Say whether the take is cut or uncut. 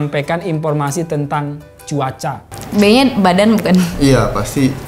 cut